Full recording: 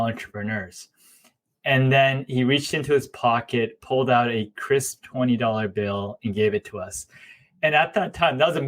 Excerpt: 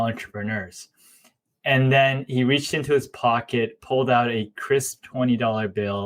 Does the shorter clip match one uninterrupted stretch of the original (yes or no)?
yes